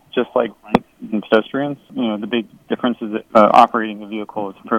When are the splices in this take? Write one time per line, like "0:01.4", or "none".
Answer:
0:01.9
0:03.3